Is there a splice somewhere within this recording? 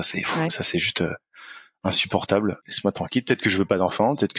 yes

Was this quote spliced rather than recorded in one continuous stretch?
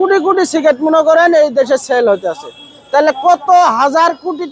no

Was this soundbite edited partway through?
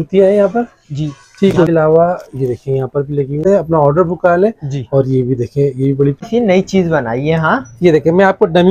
yes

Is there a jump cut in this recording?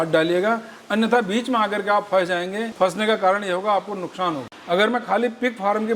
yes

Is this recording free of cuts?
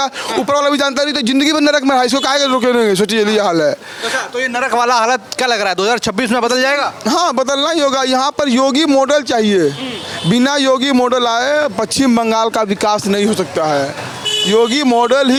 yes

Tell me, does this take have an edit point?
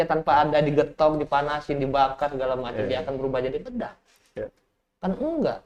no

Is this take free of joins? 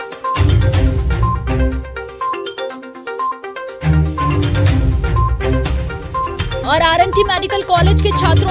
yes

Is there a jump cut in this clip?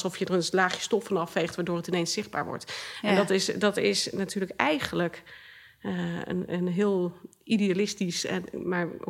no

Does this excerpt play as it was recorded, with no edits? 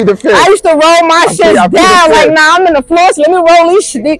yes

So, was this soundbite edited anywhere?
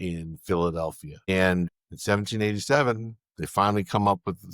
yes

